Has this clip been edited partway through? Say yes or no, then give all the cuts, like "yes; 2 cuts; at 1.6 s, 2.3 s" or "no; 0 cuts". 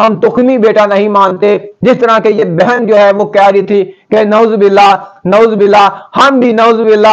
no; 0 cuts